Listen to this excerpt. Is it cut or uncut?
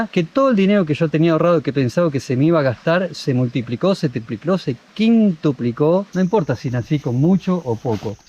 cut